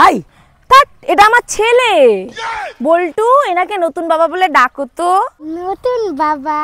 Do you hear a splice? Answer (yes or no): no